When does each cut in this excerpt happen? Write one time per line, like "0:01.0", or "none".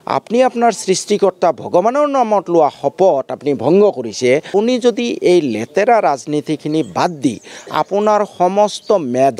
0:04.5